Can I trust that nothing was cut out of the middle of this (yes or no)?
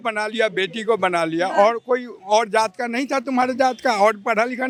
yes